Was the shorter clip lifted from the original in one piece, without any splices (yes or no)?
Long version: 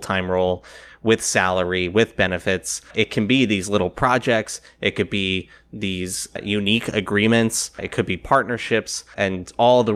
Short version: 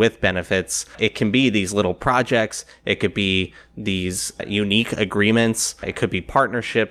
yes